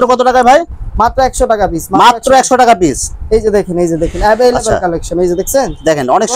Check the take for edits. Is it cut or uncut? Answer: uncut